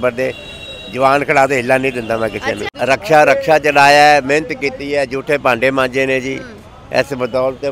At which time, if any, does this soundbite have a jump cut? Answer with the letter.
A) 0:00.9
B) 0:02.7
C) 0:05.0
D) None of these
B